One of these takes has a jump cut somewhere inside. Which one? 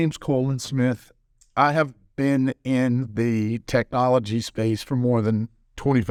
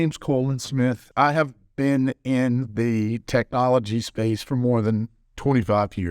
second; 1 cut; at 1.0 s

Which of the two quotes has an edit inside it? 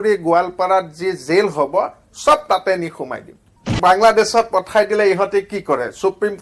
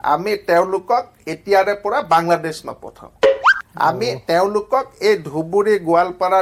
first; 1 cut; at 3.8 s

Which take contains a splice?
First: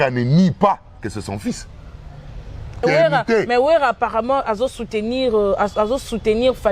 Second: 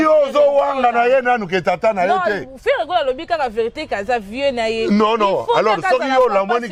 first; 1 cut; at 2.8 s

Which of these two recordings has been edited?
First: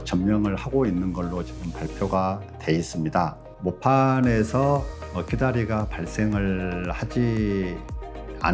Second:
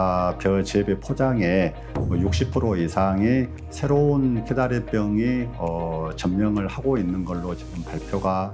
first; 1 cut; at 3.5 s

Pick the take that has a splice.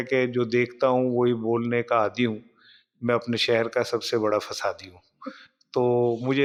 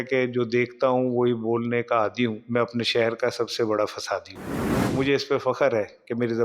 second; 2 cuts; at 2.4 s, 4.9 s

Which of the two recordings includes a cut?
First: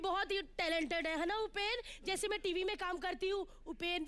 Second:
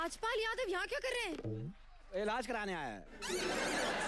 second; 1 cut; at 2.0 s

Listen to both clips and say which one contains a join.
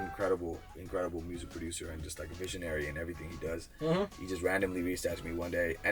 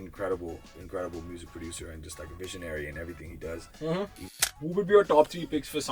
second; 1 cut; at 4.4 s

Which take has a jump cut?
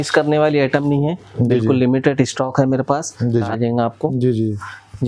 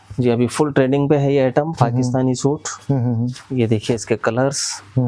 first; 1 cut; at 3.3 s

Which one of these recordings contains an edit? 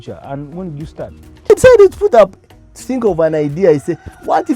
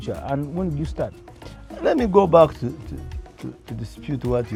first; 1 cut; at 1.5 s

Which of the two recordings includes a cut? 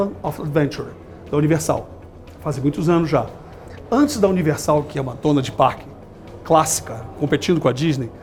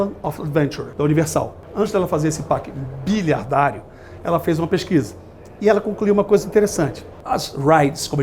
second; 3 cuts; at 0.8 s, 1.6 s, 7.1 s

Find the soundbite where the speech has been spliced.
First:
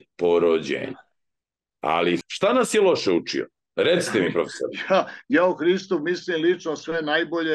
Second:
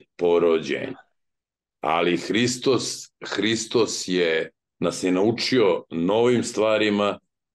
first; 1 cut; at 2.2 s

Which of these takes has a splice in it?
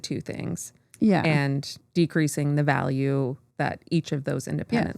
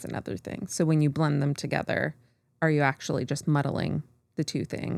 first; 2 cuts; at 1.8 s, 3.4 s

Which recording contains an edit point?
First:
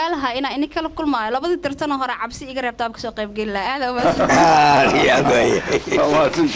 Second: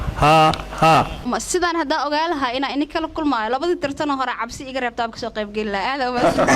second; 1 cut; at 1.3 s

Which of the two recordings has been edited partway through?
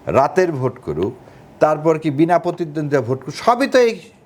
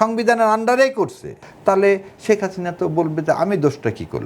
second; 1 cut; at 1.5 s

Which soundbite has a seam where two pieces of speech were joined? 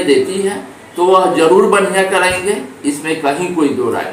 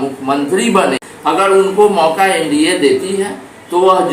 second; 1 cut; at 1.1 s

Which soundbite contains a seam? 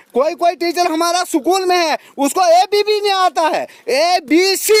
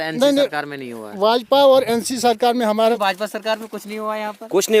second; 1 cut; at 3.0 s

